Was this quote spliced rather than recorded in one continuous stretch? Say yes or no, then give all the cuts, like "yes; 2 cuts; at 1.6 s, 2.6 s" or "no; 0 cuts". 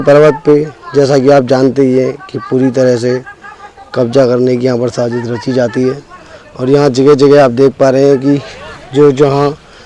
no; 0 cuts